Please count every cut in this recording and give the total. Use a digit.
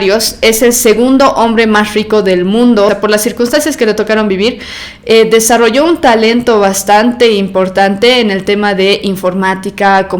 1